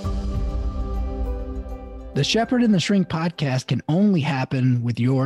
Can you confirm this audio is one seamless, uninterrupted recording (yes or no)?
no